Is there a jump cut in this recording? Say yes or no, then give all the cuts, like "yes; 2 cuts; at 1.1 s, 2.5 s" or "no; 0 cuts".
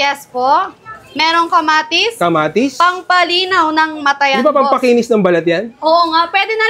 no; 0 cuts